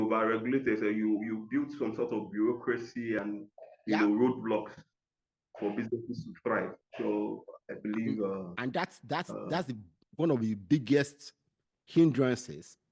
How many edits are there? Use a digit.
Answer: 0